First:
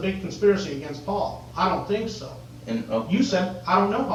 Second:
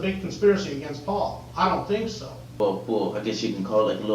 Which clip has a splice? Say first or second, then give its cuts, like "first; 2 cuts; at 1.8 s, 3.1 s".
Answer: second; 1 cut; at 2.5 s